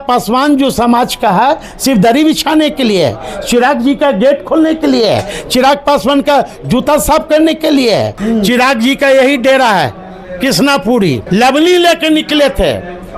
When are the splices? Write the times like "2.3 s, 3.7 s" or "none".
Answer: 8.2 s, 11.2 s